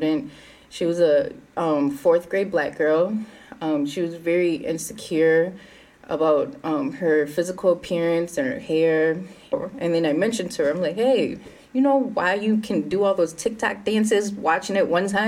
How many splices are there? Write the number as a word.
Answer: one